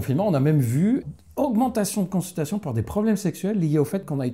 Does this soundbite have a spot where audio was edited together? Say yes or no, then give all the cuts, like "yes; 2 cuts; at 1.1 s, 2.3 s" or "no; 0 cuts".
yes; 1 cut; at 1.0 s